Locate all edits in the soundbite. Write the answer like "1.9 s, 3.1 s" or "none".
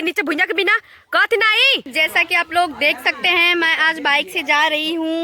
1.9 s